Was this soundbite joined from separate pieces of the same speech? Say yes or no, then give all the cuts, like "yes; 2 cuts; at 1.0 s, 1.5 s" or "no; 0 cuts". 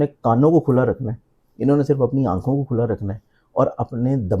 no; 0 cuts